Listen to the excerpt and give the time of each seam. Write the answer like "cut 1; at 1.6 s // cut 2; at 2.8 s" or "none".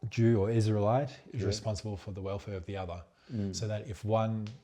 none

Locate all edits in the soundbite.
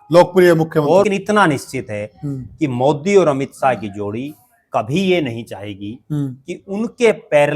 cut 1; at 1.0 s

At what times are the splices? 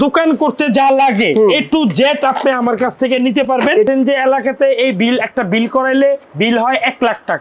cut 1; at 3.9 s

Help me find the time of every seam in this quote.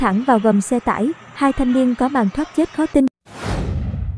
cut 1; at 3.2 s

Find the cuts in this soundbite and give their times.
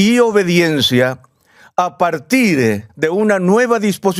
cut 1; at 2.9 s

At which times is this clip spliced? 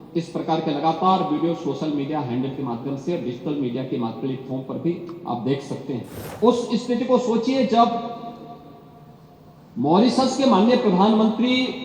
cut 1; at 6.2 s

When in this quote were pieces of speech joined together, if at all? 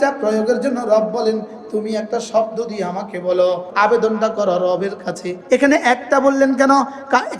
cut 1; at 3.7 s // cut 2; at 5.3 s

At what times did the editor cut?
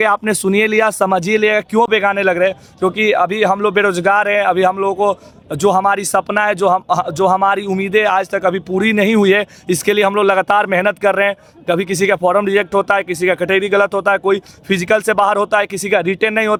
none

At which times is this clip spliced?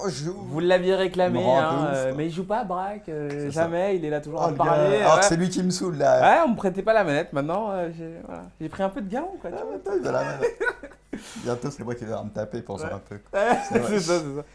none

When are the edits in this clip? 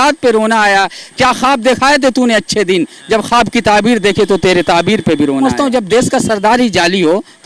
cut 1; at 5.5 s

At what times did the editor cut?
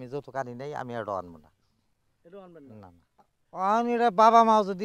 cut 1; at 3.3 s

